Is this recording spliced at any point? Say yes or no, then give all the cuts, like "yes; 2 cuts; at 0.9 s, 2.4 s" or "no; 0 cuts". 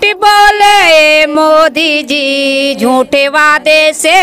no; 0 cuts